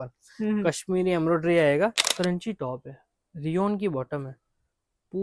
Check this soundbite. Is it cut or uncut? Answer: cut